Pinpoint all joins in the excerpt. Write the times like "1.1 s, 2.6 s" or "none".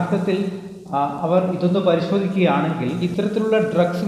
3.0 s